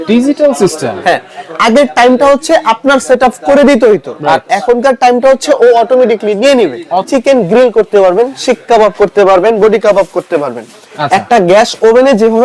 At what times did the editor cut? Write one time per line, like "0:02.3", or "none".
0:07.1

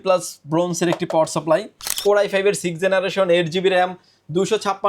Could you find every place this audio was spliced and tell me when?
0:02.0

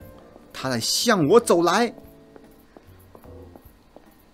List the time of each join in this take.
none

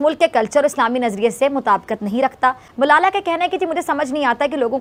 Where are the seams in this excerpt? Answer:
none

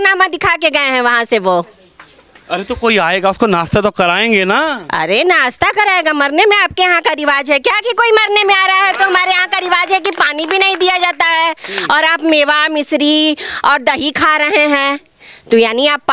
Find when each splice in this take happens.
none

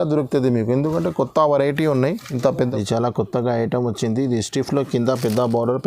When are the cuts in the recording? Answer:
0:02.5

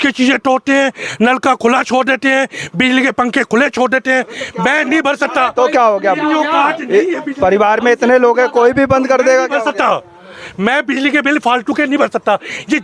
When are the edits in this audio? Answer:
none

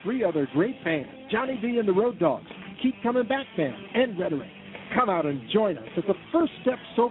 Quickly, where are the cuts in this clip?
none

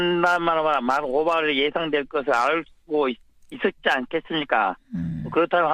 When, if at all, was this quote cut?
none

